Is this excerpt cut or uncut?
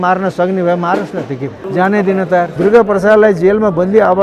cut